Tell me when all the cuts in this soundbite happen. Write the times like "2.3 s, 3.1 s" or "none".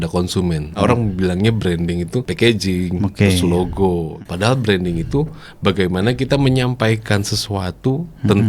0.8 s, 2.3 s, 4.1 s